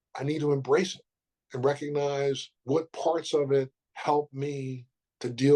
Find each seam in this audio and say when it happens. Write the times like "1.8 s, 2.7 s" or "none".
2.5 s, 3.8 s